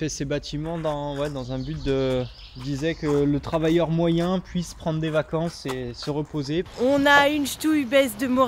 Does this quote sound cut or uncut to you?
cut